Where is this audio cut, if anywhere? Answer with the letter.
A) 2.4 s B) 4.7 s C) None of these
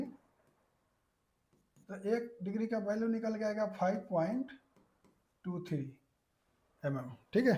C